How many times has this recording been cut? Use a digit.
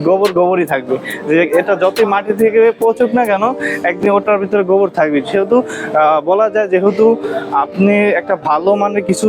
0